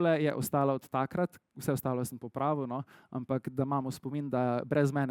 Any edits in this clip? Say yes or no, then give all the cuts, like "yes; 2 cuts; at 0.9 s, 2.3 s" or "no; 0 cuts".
no; 0 cuts